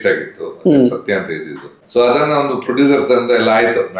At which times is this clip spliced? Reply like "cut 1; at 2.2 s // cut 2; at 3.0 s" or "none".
cut 1; at 1.8 s